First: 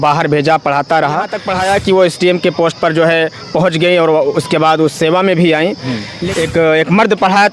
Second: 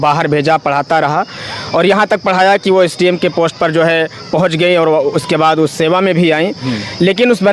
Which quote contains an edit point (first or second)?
first